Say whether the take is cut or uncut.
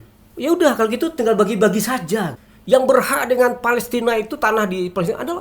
cut